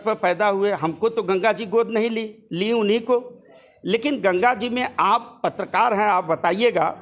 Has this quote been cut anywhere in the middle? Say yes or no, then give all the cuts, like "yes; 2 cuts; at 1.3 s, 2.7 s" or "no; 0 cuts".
no; 0 cuts